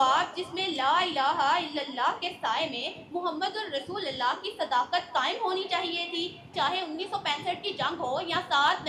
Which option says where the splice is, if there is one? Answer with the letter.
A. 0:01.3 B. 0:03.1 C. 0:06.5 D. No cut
C